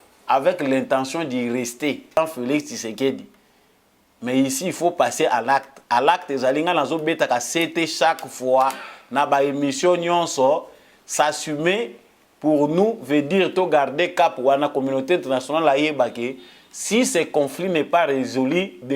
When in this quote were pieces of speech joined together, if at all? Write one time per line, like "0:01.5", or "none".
0:02.2

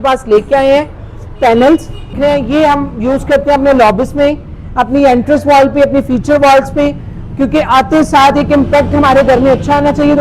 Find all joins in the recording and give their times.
0:02.1

